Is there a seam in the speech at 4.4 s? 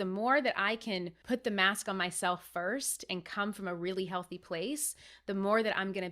no; 1 cut; at 1.1 s

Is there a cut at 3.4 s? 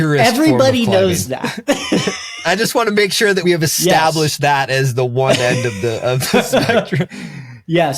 yes; 2 cuts; at 2.4 s, 3.4 s

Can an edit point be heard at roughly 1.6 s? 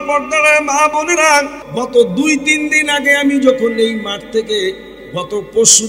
yes; 1 cut; at 1.6 s

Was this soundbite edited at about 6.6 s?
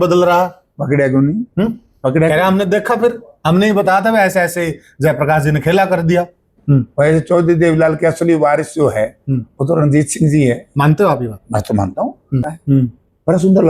yes; 2 cuts; at 6.6 s, 12.5 s

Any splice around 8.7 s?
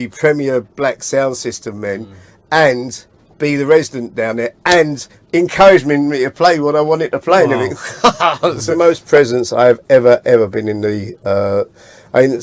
yes; 1 cut; at 8.7 s

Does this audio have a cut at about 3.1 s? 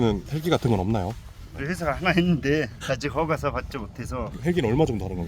no; 2 cuts; at 1.6 s, 4.3 s

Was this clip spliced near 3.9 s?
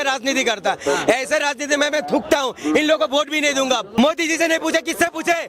yes; 1 cut; at 3.9 s

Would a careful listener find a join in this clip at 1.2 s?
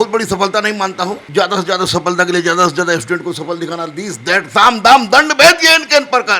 yes; 1 cut; at 1.2 s

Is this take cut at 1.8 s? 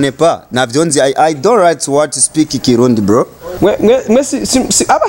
no; 1 cut; at 3.4 s

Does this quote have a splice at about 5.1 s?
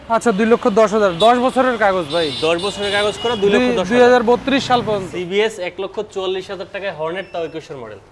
yes; 1 cut; at 5.1 s

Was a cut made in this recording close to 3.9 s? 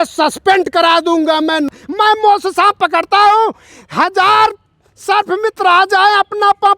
no; 1 cut; at 1.7 s

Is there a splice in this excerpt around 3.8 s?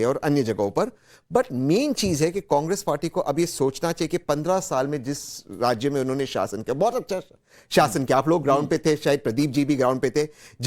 yes; 1 cut; at 3.8 s

